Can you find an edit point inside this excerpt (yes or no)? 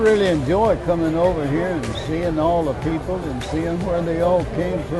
no